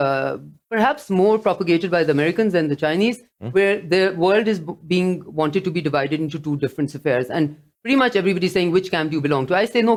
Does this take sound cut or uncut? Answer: uncut